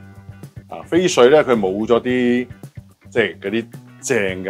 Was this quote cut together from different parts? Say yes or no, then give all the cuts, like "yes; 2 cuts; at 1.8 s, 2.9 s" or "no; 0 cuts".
no; 0 cuts